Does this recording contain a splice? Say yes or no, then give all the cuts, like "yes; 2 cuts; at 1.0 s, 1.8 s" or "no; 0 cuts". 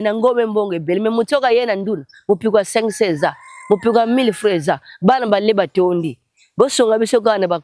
no; 0 cuts